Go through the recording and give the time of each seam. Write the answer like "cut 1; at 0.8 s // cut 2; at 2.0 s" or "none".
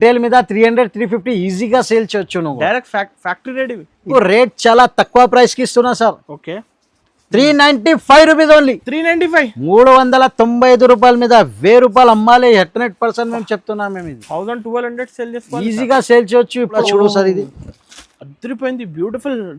cut 1; at 4.1 s // cut 2; at 16.8 s